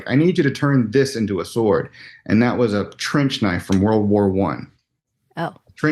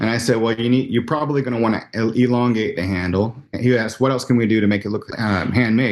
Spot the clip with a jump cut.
second; 1 cut; at 5.0 s

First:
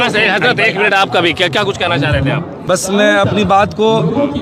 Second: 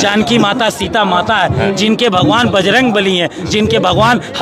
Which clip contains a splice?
first; 1 cut; at 2.5 s

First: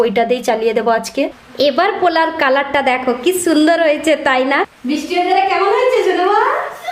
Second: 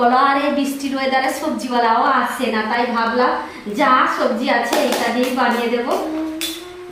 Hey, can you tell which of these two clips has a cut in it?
first; 2 cuts; at 1.6 s, 4.7 s

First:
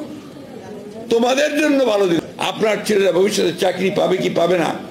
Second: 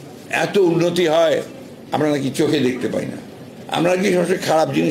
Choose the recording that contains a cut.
first; 1 cut; at 2.2 s

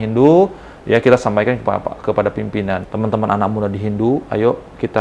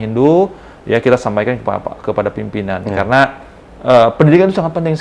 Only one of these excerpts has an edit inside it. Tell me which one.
first; 1 cut; at 2.8 s

